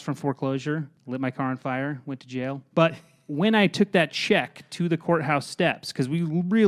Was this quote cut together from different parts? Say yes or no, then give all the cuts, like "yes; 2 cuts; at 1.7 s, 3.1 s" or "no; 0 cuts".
yes; 2 cuts; at 0.9 s, 2.6 s